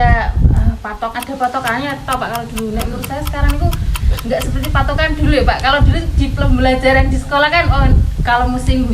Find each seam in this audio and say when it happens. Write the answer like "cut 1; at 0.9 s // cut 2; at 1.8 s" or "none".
cut 1; at 1.1 s

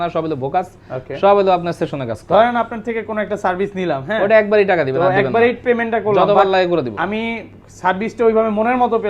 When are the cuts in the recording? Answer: none

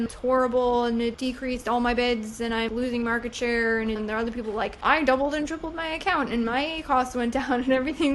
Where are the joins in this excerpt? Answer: cut 1; at 1.2 s // cut 2; at 2.7 s // cut 3; at 4.0 s

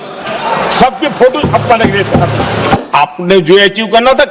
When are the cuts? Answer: cut 1; at 2.8 s

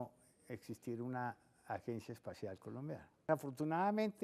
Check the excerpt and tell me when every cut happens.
cut 1; at 3.3 s

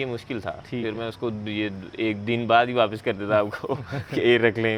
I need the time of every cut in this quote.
none

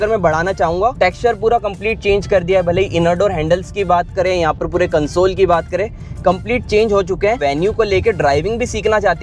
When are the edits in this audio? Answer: cut 1; at 0.9 s // cut 2; at 7.4 s

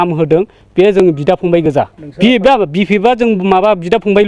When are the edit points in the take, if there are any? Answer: cut 1; at 2.0 s

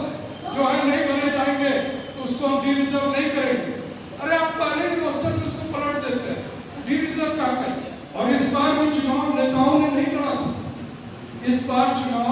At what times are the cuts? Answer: cut 1; at 8.0 s

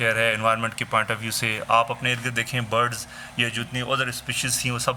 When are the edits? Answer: none

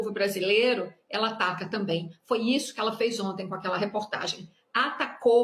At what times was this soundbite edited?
none

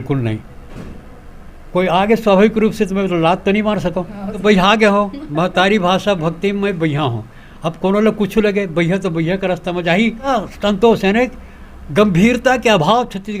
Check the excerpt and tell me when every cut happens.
cut 1; at 4.4 s // cut 2; at 10.3 s

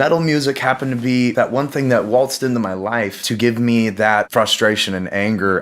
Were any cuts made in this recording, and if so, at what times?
cut 1; at 1.3 s // cut 2; at 3.2 s // cut 3; at 4.3 s

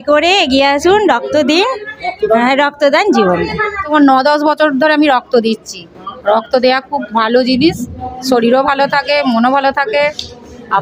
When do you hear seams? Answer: cut 1; at 3.9 s

